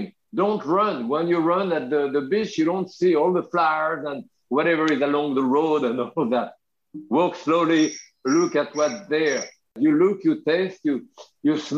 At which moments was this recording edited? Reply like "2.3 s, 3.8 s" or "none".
9.8 s